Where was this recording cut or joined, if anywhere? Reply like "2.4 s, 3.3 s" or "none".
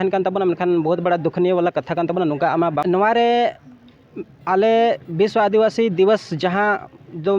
2.8 s